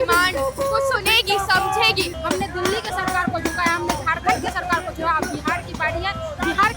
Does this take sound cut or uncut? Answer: cut